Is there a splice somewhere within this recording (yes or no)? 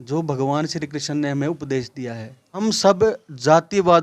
yes